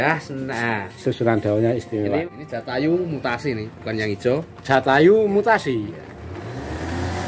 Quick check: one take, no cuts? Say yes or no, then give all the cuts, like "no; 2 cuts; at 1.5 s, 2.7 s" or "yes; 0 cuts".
no; 1 cut; at 2.2 s